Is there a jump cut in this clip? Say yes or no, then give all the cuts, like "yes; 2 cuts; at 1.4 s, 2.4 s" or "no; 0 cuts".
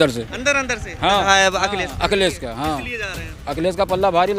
yes; 1 cut; at 1.2 s